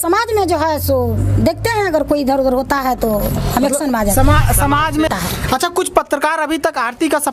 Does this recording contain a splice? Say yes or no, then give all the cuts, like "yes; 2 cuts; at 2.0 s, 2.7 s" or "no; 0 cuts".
yes; 1 cut; at 5.1 s